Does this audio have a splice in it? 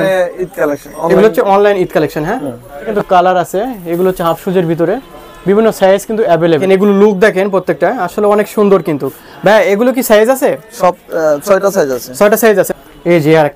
yes; 3 cuts; at 2.9 s, 6.6 s, 12.7 s

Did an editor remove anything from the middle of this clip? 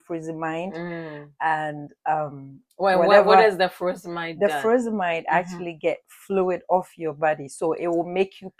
no; 0 cuts

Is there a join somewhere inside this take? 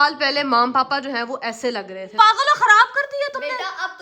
yes; 1 cut; at 2.1 s

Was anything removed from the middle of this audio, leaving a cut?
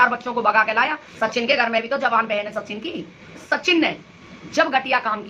yes; 2 cuts; at 1.0 s, 3.4 s

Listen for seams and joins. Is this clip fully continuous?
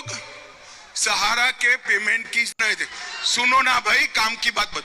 no; 1 cut; at 2.6 s

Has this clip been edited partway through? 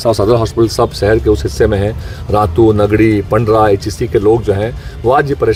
no; 0 cuts

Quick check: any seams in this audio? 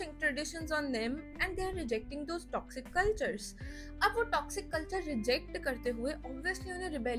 no; 0 cuts

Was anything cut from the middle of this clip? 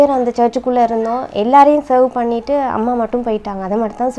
no; 0 cuts

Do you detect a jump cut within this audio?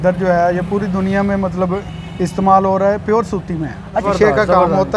yes; 1 cut; at 4.0 s

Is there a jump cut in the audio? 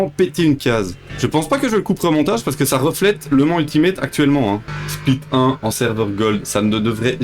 yes; 2 cuts; at 1.0 s, 4.7 s

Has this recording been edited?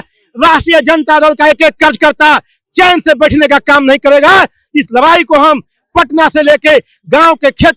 no; 0 cuts

